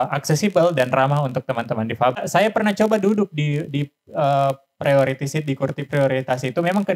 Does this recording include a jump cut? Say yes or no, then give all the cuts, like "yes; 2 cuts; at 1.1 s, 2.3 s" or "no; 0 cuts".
yes; 1 cut; at 2.2 s